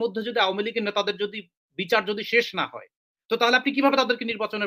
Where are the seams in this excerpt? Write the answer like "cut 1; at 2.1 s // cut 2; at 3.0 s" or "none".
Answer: none